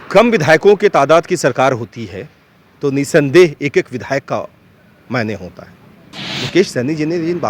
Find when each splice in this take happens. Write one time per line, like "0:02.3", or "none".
none